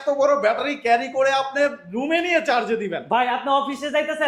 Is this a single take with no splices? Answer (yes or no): yes